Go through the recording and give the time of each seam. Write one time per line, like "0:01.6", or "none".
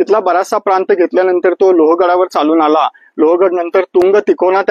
none